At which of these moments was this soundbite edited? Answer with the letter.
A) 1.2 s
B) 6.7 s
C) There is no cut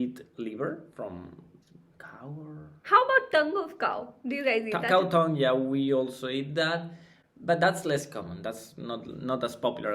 C